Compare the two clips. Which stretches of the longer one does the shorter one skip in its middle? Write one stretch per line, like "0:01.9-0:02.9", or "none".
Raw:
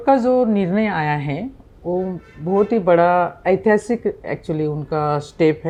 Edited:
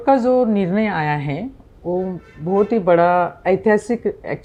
none